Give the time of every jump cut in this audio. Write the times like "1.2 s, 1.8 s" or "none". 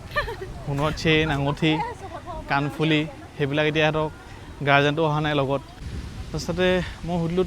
5.8 s